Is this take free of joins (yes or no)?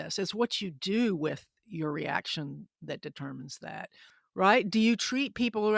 no